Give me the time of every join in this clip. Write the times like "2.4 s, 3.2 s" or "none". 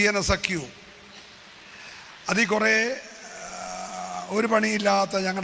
none